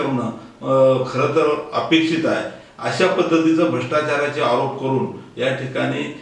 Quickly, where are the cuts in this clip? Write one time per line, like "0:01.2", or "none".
none